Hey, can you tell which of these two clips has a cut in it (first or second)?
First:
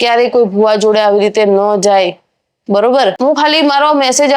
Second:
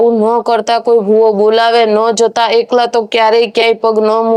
first